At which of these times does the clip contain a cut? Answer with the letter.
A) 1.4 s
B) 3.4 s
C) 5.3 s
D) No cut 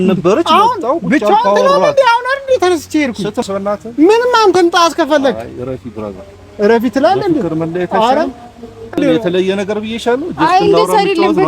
B